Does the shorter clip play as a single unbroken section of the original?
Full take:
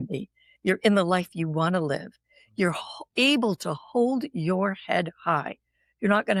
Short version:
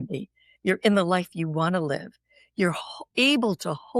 yes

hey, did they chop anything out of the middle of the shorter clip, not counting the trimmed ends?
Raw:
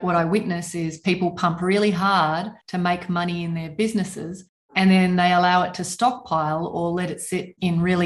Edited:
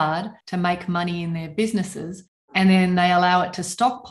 no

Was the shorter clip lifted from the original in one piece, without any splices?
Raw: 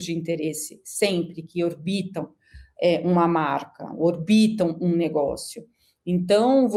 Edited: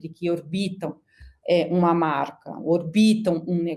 yes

